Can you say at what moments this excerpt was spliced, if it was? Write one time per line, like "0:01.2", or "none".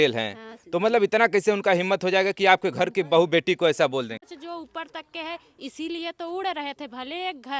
0:04.2

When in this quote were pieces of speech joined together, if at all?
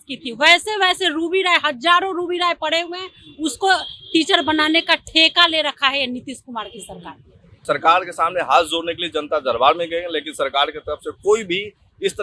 0:07.5

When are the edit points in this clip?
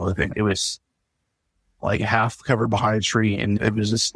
none

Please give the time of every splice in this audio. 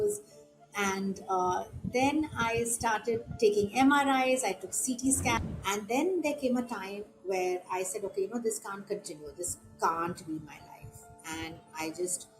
0:05.4

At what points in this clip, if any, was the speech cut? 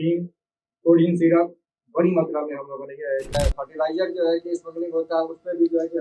0:03.3

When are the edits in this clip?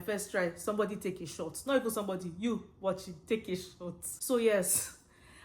0:04.1

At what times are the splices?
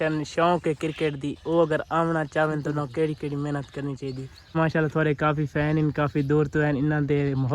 0:04.6

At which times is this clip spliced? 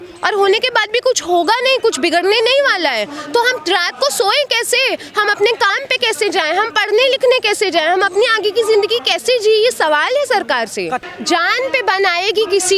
0:11.1

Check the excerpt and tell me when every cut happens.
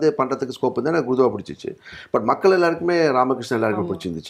none

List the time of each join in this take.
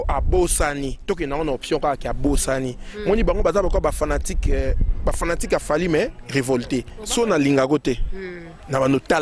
0:07.0

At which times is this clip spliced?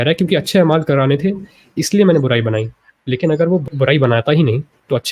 0:03.7

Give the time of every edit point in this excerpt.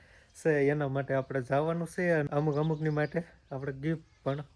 0:02.3

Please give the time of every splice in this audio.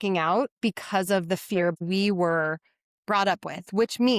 0:01.8

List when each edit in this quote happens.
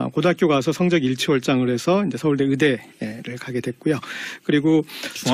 0:02.1

